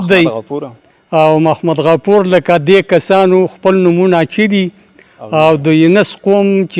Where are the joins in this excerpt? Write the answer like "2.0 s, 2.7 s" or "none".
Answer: none